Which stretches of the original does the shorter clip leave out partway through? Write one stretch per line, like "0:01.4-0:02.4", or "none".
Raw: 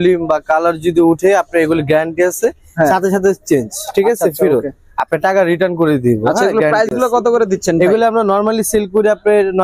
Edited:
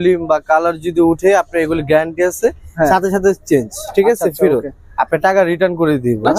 none